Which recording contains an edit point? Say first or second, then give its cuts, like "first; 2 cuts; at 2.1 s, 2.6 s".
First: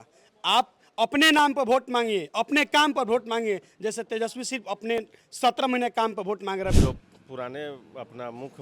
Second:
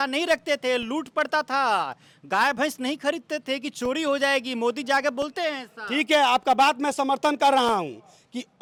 first; 1 cut; at 6.8 s